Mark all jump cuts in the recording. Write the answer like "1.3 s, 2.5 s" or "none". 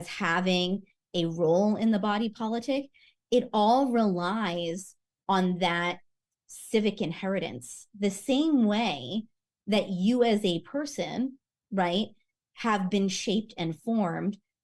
none